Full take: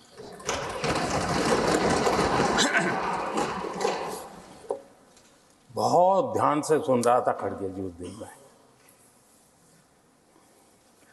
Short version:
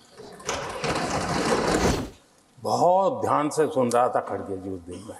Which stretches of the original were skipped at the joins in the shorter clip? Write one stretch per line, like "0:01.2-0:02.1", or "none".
0:01.9-0:05.0